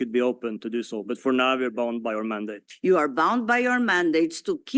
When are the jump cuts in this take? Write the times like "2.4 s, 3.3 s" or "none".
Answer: 2.7 s